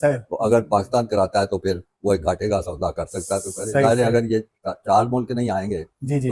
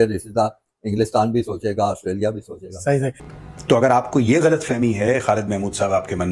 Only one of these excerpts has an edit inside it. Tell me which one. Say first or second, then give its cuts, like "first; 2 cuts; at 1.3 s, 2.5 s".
second; 1 cut; at 3.3 s